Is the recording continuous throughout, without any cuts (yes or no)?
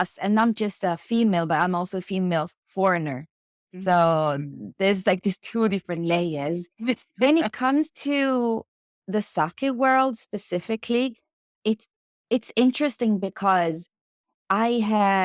no